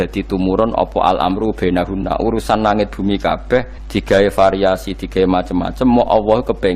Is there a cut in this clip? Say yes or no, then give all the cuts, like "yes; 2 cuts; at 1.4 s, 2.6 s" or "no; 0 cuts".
yes; 1 cut; at 3.8 s